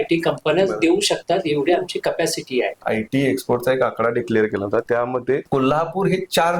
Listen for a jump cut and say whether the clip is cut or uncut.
cut